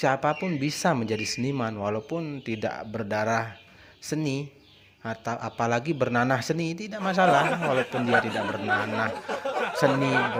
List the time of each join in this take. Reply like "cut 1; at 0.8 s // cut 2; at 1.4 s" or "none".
none